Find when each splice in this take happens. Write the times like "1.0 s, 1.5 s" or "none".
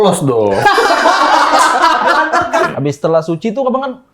2.7 s